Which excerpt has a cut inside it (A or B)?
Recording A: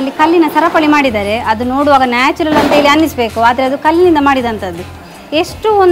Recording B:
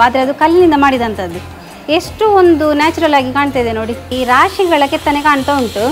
B